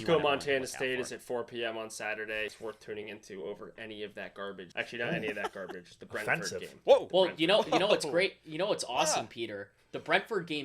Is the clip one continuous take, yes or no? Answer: no